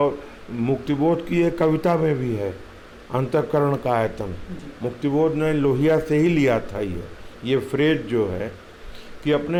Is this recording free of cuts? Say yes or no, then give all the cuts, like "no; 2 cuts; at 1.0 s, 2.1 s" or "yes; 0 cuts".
yes; 0 cuts